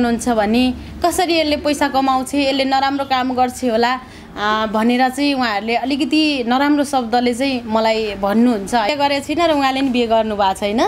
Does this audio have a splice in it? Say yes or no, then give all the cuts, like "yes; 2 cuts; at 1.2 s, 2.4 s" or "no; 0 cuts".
yes; 1 cut; at 8.9 s